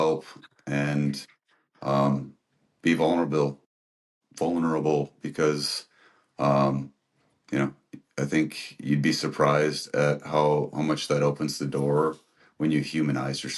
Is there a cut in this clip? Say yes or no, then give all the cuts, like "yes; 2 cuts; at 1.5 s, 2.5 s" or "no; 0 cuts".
no; 0 cuts